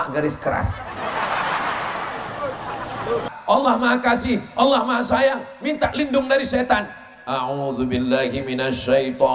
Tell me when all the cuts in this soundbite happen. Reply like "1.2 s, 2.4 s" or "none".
3.3 s

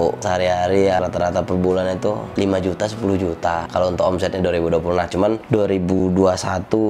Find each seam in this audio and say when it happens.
1.0 s, 3.6 s, 6.0 s

